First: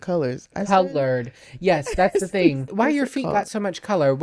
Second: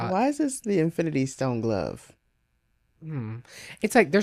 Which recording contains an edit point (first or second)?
first